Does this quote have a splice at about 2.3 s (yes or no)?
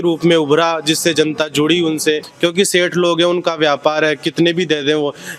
yes